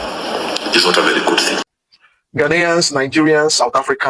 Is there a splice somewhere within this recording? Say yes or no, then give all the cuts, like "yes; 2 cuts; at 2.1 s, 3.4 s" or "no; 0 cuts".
yes; 1 cut; at 1.7 s